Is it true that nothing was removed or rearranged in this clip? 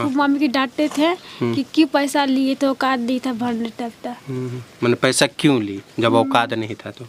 yes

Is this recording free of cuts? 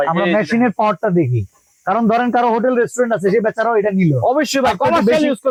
yes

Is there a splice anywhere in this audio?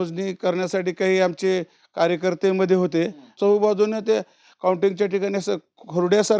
yes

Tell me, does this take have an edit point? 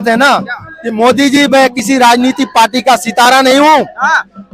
no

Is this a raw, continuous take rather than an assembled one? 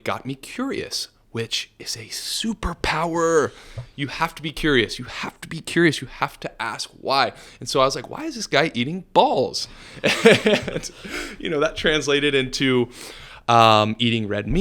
yes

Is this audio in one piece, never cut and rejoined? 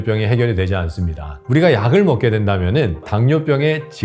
no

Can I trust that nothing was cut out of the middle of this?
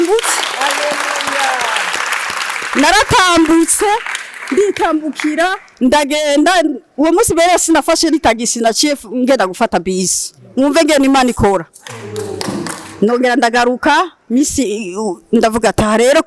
yes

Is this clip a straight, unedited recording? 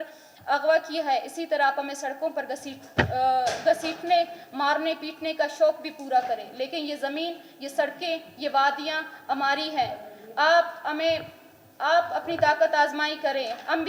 yes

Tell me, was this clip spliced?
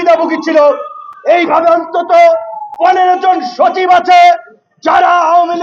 no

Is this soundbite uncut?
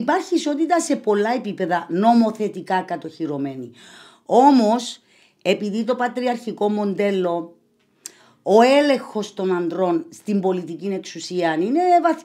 yes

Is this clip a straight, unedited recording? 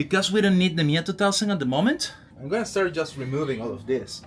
yes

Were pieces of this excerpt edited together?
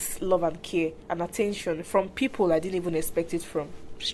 yes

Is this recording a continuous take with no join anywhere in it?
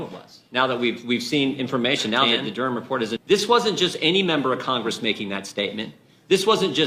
no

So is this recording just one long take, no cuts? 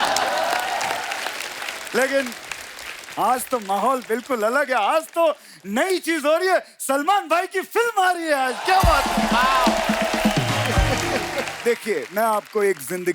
no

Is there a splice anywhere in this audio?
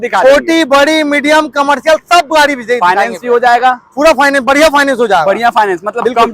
no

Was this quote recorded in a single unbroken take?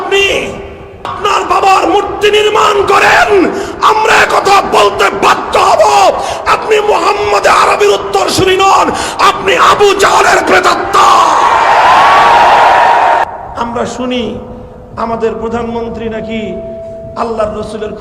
no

